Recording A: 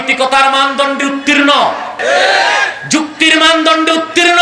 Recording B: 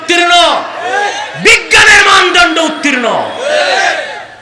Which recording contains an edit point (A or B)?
A